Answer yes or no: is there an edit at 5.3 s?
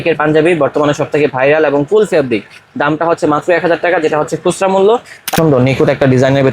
yes